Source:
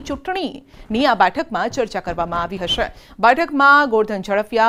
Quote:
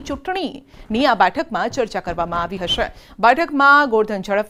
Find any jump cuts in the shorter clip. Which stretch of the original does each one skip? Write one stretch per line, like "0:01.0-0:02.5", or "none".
none